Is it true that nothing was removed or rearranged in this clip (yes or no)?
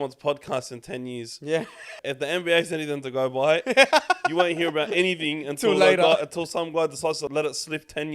no